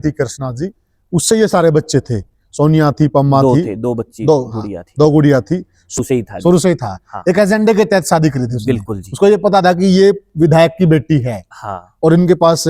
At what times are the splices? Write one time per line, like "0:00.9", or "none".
0:06.0